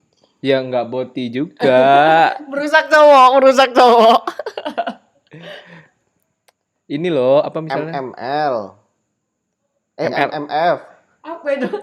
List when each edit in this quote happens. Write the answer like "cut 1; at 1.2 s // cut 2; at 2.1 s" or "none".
none

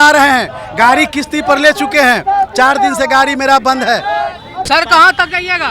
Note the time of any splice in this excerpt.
cut 1; at 4.6 s

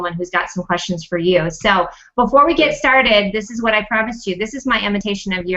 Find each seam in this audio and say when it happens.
cut 1; at 2.2 s

